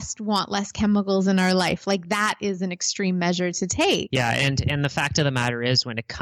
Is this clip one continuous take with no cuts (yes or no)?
no